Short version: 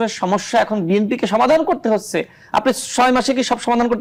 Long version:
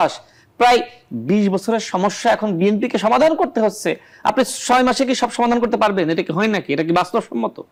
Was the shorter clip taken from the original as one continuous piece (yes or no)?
yes